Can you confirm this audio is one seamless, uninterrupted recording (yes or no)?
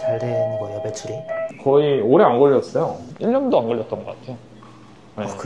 yes